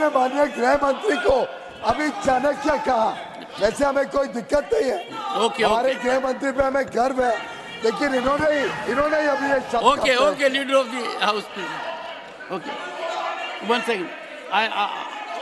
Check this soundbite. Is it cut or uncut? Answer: uncut